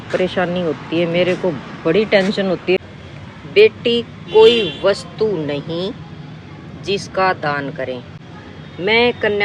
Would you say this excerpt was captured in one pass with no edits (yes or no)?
no